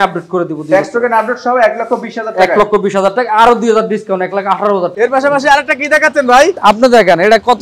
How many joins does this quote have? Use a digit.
2